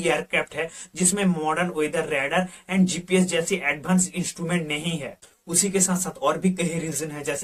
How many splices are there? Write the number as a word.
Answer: zero